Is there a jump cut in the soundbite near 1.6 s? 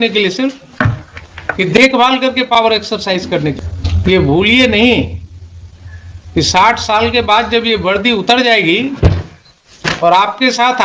no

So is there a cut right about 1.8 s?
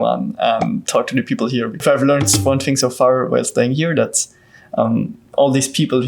yes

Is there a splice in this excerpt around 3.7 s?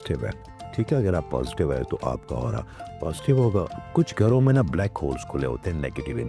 yes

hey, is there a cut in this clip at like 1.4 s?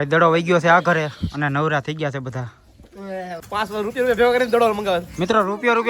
no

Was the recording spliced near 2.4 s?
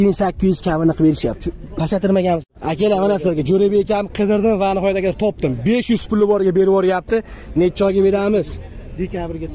yes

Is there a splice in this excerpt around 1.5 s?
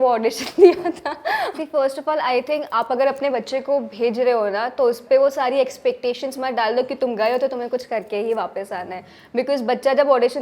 yes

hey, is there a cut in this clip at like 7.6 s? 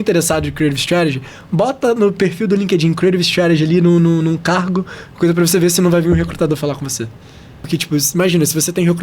yes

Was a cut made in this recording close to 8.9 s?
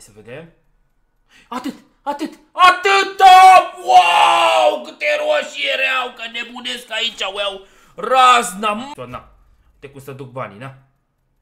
yes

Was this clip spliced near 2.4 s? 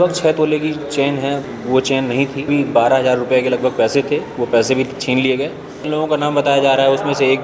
yes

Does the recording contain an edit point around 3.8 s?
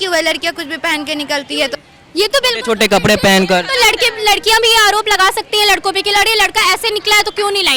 no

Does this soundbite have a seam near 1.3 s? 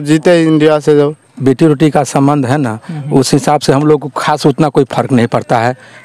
yes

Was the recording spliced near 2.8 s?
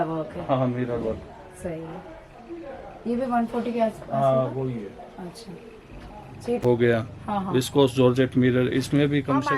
no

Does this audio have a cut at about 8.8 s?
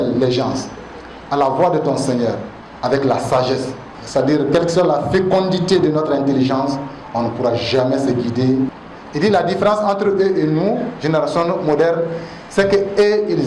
yes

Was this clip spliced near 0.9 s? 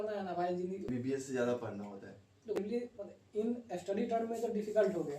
yes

